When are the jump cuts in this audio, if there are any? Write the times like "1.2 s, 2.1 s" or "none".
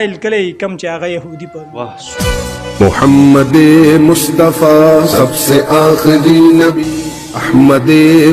2.0 s